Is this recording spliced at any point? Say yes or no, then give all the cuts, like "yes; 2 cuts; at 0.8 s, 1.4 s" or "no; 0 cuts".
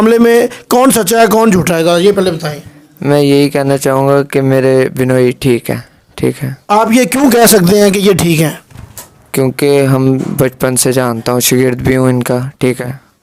no; 0 cuts